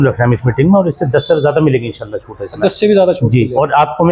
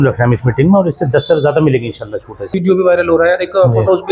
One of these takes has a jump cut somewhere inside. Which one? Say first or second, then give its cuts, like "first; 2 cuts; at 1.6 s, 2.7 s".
second; 1 cut; at 2.5 s